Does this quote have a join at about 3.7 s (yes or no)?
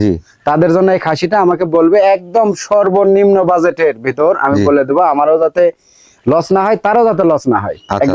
no